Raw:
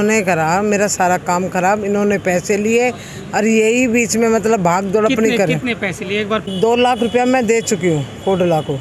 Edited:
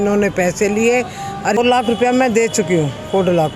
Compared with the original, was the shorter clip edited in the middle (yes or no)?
yes